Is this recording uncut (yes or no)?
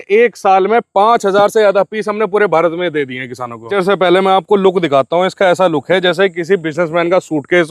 no